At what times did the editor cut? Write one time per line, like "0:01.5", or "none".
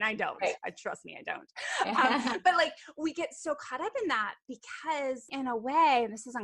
0:05.3